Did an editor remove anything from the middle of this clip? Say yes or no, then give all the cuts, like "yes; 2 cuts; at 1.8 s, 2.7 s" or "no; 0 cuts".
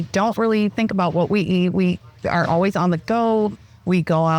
no; 0 cuts